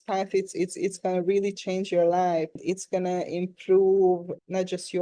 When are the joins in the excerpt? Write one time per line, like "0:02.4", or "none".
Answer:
0:02.6